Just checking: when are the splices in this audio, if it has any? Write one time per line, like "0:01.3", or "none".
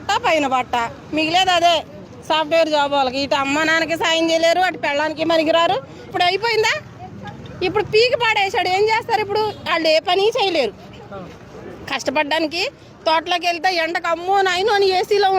0:06.1